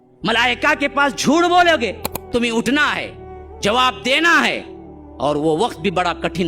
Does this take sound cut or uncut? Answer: cut